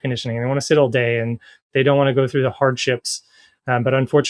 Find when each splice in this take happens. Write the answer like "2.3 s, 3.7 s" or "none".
none